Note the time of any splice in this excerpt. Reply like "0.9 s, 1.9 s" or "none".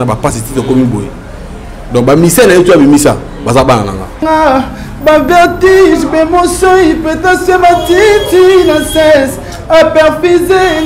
4.2 s